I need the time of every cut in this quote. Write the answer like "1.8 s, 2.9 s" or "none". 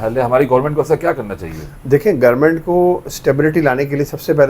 none